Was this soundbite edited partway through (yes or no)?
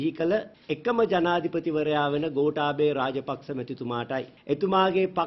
no